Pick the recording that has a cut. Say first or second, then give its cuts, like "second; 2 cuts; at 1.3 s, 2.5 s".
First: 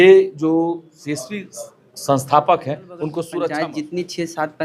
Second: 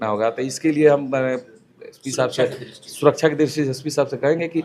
first; 1 cut; at 3.5 s